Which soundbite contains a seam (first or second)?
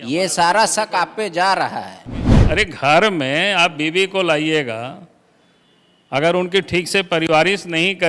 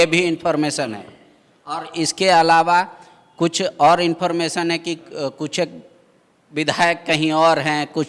first